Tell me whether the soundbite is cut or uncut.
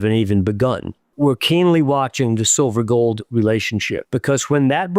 cut